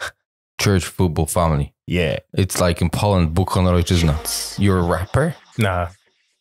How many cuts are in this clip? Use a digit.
2